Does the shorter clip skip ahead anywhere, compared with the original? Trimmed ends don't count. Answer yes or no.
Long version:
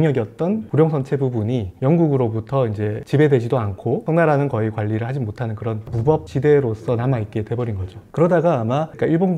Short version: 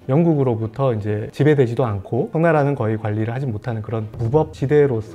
no